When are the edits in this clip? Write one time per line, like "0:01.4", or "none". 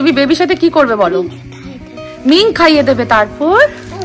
none